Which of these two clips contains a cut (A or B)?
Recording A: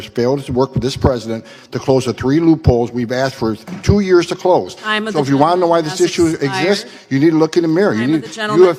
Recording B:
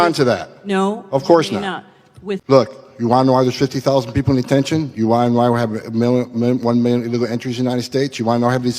B